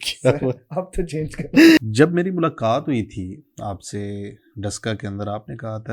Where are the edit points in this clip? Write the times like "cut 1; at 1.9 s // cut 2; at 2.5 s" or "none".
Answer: cut 1; at 1.8 s